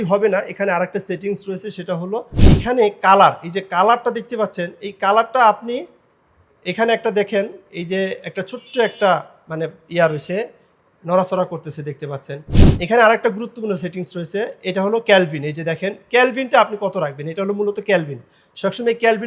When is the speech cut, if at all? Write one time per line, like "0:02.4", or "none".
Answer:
0:02.4
0:12.4